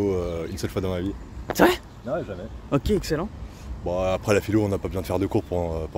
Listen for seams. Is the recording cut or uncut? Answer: uncut